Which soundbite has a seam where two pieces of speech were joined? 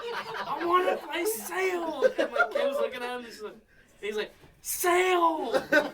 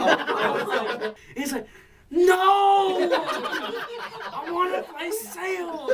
second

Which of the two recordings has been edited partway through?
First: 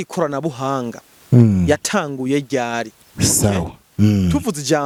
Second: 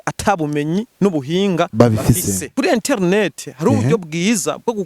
second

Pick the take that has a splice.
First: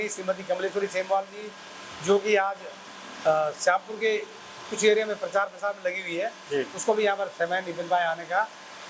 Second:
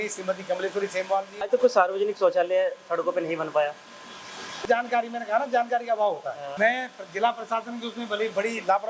second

